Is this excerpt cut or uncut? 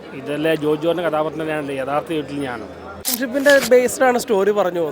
cut